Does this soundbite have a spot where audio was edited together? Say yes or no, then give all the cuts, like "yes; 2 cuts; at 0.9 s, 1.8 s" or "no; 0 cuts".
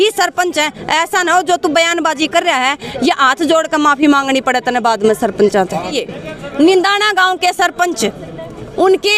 yes; 1 cut; at 6.0 s